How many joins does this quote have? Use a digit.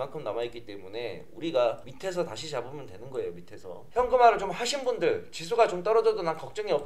2